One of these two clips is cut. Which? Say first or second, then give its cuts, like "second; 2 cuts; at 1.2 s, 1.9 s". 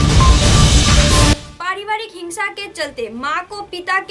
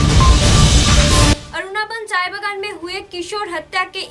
first; 1 cut; at 1.4 s